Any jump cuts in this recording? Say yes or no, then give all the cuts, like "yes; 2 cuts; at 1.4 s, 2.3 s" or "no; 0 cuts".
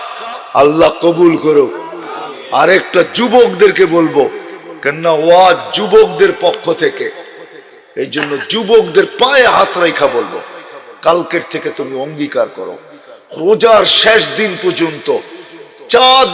no; 0 cuts